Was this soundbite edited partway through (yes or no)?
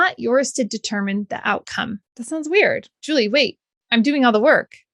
yes